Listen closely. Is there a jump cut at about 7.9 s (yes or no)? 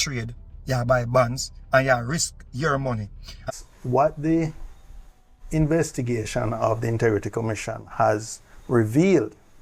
no